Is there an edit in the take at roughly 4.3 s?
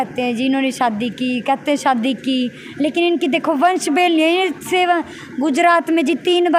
no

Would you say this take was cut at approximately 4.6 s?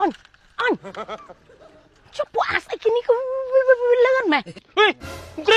yes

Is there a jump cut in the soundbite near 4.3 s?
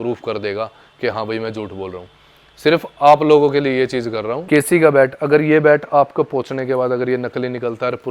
yes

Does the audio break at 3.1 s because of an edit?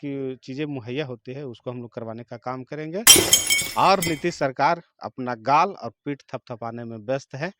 yes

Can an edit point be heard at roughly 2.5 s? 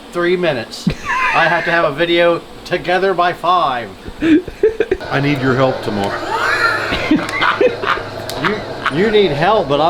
no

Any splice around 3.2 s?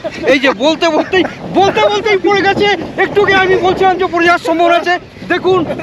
no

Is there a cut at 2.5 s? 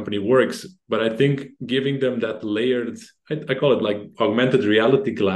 no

